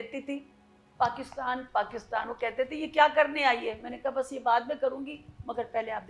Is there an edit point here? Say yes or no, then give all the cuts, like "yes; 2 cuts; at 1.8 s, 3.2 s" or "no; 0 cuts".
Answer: no; 0 cuts